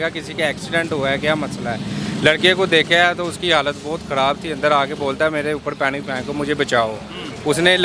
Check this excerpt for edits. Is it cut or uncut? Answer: uncut